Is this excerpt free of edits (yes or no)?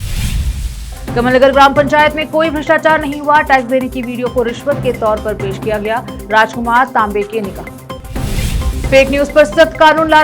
no